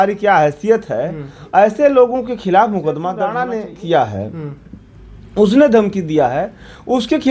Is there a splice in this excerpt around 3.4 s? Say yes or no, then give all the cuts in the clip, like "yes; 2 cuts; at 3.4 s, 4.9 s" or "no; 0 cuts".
yes; 1 cut; at 3.4 s